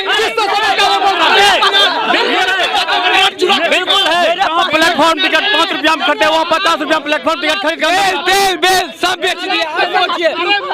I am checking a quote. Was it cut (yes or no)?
no